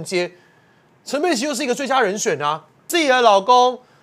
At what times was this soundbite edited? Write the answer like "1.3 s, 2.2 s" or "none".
2.9 s